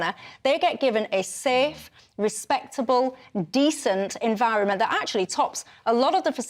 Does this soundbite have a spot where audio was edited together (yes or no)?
no